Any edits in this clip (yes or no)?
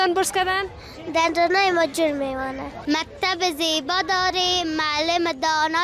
yes